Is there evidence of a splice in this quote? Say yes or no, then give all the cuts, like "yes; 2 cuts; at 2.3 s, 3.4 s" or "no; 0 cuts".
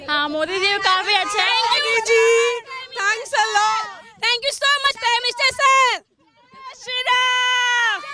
no; 0 cuts